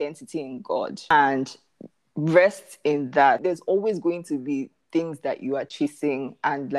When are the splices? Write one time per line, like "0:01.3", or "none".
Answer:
0:01.0